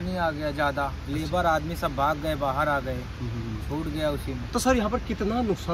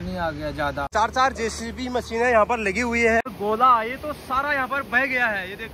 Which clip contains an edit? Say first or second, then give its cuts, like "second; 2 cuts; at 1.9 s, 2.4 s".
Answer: second; 2 cuts; at 0.9 s, 3.3 s